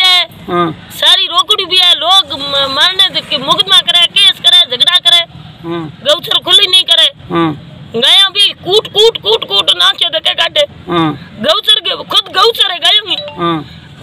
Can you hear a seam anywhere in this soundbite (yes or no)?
no